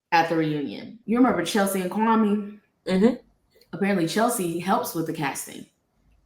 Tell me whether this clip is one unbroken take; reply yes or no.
no